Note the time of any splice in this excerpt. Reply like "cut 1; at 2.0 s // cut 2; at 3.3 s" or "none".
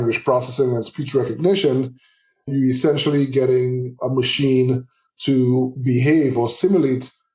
cut 1; at 4.0 s